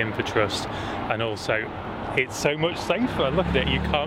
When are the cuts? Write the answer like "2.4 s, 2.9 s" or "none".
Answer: none